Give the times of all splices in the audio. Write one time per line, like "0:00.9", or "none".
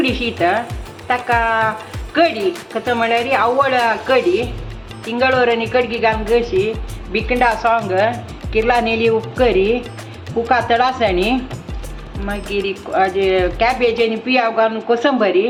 none